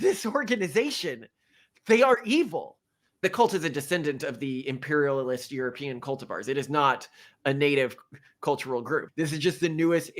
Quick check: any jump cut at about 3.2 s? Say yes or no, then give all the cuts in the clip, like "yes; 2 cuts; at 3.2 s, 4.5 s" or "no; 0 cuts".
yes; 2 cuts; at 3.2 s, 9.1 s